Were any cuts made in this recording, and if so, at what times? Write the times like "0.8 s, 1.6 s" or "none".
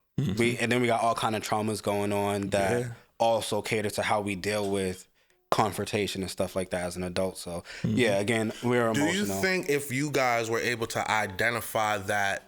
none